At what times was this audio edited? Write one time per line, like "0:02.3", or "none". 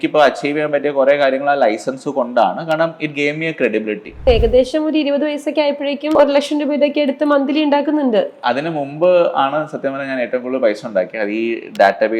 0:04.2
0:06.2

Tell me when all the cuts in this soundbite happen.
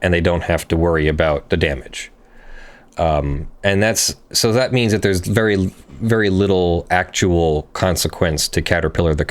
none

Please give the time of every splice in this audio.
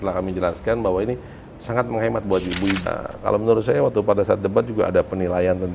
0:02.9

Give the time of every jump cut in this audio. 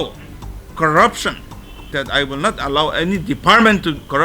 0:02.0

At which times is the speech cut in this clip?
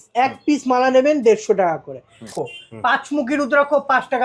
0:02.3

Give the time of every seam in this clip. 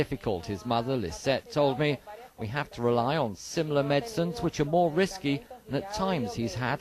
0:01.2

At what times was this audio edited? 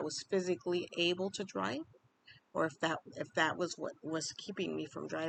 none

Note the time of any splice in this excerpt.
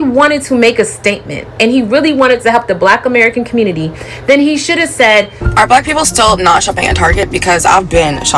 0:05.4

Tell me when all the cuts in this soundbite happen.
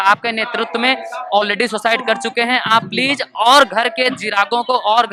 none

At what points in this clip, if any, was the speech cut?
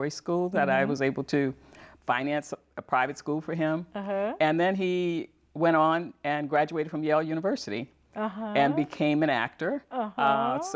none

